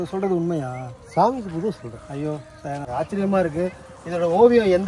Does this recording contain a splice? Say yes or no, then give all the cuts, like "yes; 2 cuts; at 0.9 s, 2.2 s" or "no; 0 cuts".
yes; 1 cut; at 2.8 s